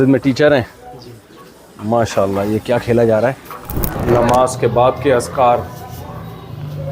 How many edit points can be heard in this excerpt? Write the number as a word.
one